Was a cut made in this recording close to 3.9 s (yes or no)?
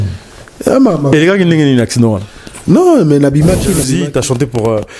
yes